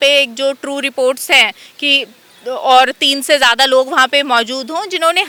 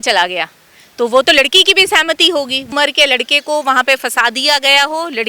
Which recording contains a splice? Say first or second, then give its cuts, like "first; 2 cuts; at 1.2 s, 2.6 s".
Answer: second; 1 cut; at 2.7 s